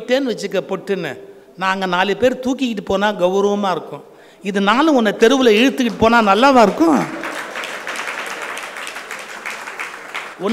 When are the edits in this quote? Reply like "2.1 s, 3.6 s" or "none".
none